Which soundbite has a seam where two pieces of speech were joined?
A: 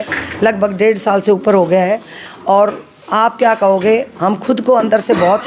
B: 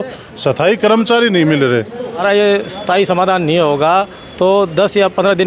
B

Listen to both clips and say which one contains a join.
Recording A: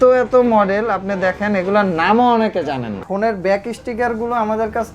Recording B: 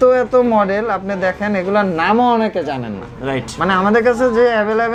A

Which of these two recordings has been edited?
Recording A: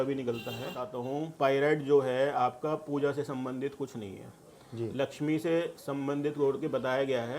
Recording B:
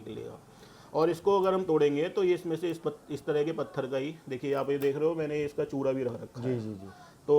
A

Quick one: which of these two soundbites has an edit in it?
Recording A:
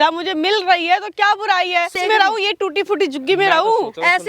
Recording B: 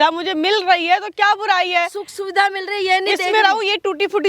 A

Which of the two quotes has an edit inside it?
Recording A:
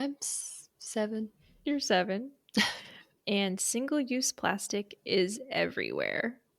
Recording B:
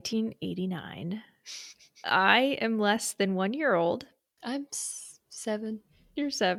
A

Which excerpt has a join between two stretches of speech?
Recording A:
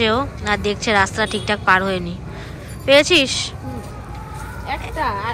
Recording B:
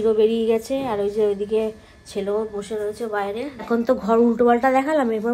B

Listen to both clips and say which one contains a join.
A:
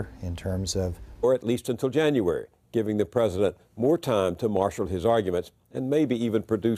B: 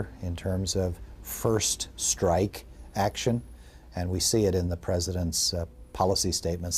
B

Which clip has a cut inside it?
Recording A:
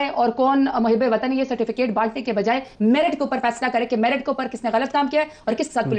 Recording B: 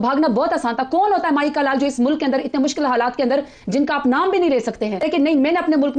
B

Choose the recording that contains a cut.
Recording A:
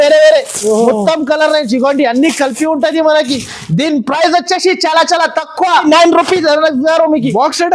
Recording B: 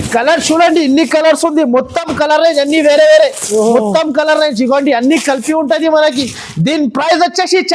A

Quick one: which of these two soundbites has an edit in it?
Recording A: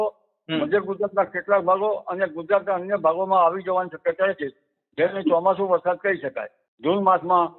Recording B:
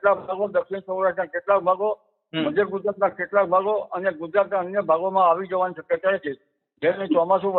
A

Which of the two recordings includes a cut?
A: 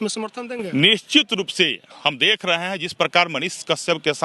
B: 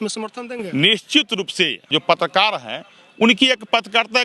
B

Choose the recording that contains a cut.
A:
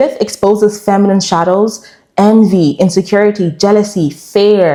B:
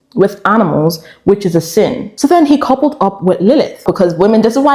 B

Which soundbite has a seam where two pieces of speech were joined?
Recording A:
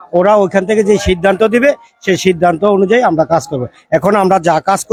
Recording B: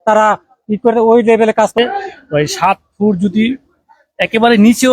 B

